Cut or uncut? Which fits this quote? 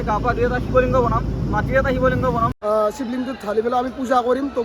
cut